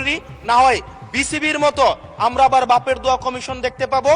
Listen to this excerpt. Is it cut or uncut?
uncut